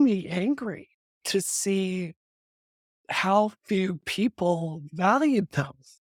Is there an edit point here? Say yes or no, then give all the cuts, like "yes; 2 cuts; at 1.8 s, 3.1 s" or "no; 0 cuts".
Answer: no; 0 cuts